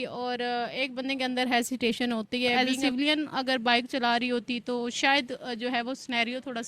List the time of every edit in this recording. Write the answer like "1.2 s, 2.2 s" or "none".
2.5 s